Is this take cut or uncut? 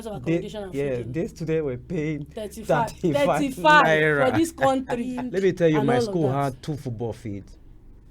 cut